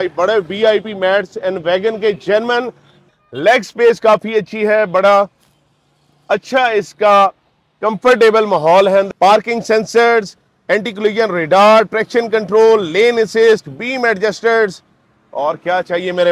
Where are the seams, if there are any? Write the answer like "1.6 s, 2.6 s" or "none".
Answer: 3.0 s, 9.1 s